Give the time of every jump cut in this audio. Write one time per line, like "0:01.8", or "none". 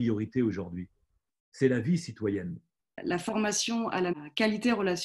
0:03.0
0:04.1